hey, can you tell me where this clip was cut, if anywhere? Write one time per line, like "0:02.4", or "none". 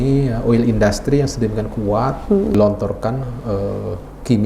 0:02.5